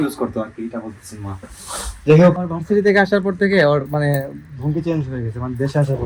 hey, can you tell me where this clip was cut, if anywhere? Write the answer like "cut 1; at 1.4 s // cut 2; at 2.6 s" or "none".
cut 1; at 2.5 s